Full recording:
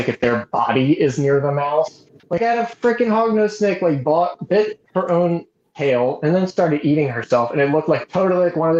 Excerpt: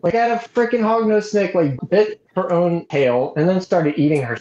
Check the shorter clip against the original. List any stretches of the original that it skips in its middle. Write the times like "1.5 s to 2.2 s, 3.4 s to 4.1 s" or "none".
4.0 s to 4.3 s, 5.4 s to 5.7 s